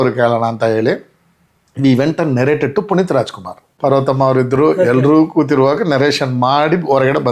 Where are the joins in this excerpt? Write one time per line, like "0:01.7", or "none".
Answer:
none